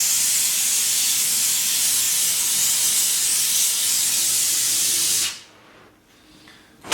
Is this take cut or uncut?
cut